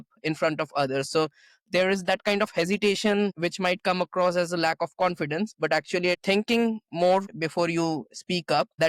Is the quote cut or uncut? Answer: cut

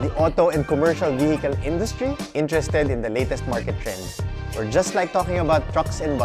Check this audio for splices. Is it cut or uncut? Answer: uncut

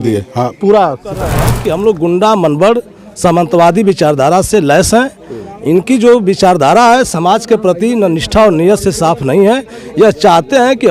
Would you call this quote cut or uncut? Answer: cut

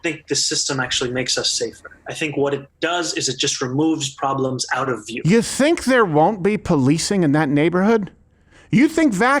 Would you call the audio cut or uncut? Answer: cut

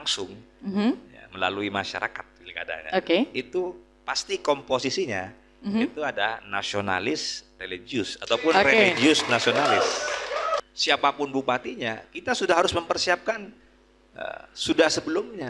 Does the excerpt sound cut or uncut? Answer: cut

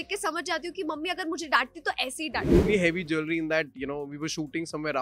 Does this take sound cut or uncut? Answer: cut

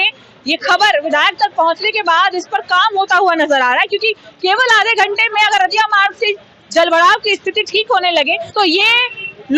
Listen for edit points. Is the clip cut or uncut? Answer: cut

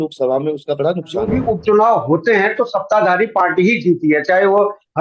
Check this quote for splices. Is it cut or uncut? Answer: cut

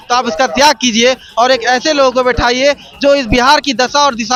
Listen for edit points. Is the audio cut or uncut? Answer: uncut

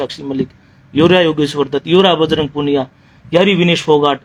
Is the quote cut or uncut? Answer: uncut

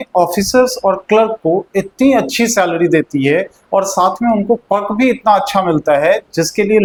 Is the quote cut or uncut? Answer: uncut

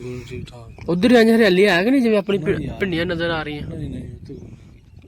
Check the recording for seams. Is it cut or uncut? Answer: uncut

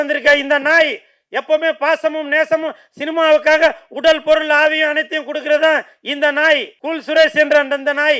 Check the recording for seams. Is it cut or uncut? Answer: cut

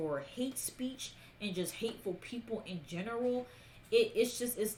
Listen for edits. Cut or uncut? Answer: uncut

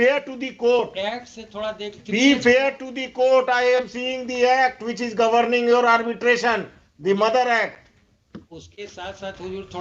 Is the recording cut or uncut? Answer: uncut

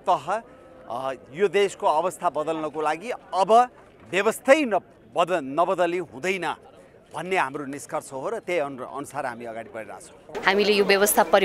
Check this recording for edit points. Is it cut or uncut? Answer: cut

